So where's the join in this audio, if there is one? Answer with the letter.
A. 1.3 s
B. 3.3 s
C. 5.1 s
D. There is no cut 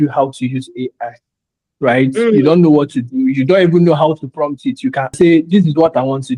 C